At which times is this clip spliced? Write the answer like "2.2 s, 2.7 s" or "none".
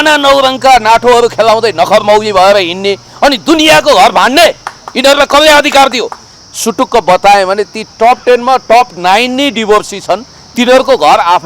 6.3 s

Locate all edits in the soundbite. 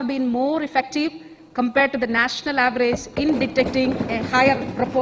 none

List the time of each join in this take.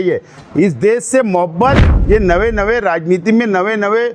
1.9 s

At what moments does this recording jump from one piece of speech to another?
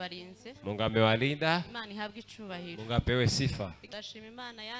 3.8 s

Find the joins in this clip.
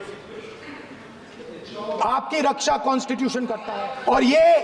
3.6 s

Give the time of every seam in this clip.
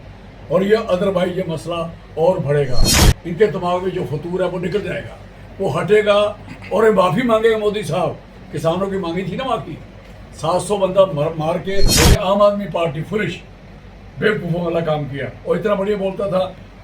11.9 s

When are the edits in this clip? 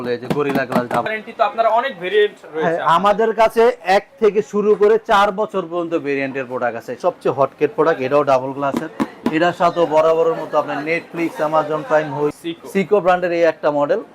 1.1 s, 6.9 s, 12.4 s

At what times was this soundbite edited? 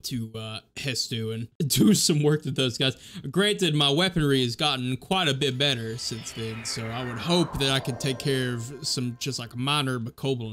1.5 s

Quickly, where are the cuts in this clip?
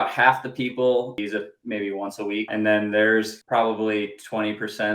1.2 s, 2.5 s, 3.4 s

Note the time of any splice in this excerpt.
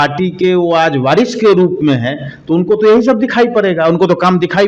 none

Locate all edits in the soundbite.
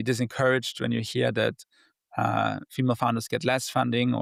none

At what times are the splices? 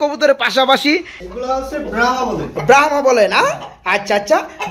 1.1 s

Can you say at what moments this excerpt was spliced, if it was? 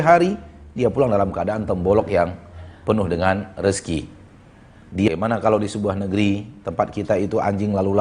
5.1 s

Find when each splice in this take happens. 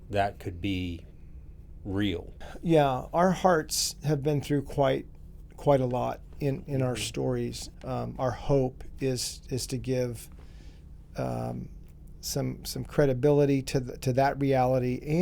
2.3 s, 7.7 s

